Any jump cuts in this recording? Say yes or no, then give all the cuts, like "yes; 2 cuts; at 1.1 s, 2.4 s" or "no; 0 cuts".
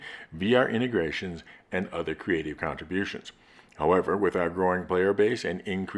yes; 1 cut; at 3.3 s